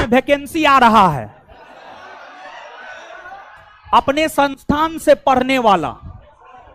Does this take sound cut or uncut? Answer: uncut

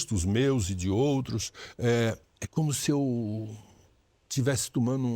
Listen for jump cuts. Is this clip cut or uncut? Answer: cut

